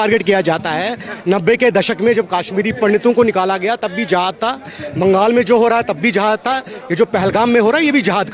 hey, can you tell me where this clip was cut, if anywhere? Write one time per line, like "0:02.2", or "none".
none